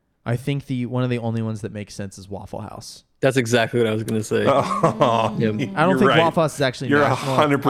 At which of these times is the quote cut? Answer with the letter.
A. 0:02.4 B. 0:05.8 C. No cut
C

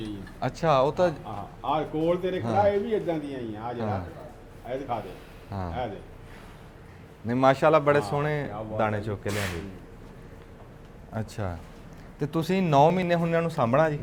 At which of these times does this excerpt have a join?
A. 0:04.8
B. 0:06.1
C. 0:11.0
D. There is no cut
D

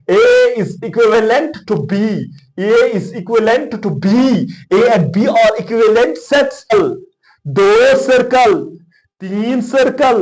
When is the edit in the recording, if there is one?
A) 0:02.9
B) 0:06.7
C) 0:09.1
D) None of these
B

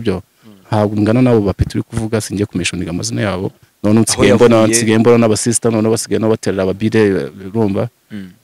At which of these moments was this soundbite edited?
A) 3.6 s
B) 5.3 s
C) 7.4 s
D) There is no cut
A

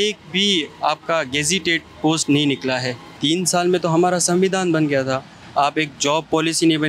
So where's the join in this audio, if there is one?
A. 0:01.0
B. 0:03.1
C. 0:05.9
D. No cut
B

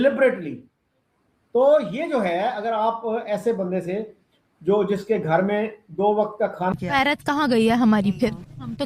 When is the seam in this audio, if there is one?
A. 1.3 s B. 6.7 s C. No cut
B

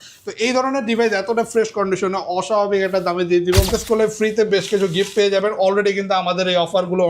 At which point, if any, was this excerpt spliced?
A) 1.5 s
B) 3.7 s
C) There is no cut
B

